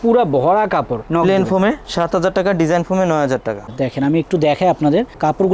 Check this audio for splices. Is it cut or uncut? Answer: cut